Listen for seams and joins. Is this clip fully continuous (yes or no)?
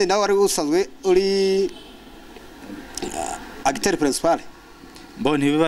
yes